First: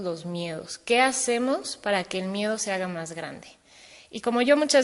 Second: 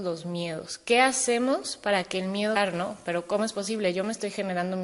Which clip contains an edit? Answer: first; 1 cut; at 2.5 s

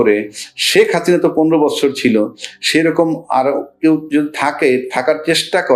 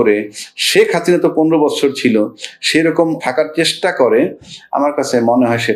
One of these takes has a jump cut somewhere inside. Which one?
second; 1 cut; at 3.2 s

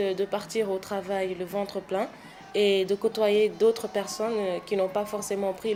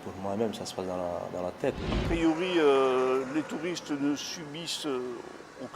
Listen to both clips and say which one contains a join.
second; 1 cut; at 2.0 s

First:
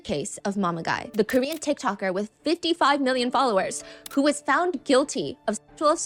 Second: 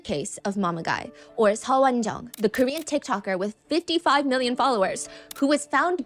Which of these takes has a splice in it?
first; 1 cut; at 1.0 s

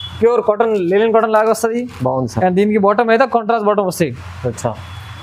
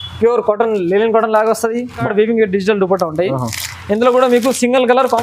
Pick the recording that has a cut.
second; 1 cut; at 2.0 s

